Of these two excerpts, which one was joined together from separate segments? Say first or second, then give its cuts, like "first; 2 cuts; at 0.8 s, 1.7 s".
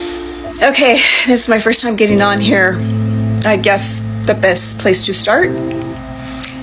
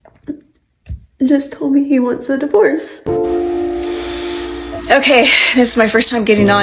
second; 1 cut; at 2.9 s